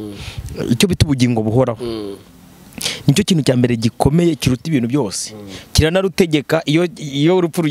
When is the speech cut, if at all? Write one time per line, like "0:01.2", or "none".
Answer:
none